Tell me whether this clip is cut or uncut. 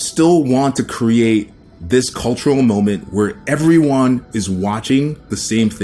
uncut